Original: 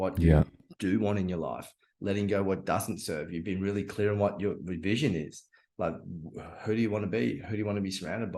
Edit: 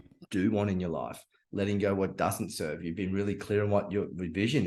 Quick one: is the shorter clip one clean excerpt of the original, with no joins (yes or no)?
yes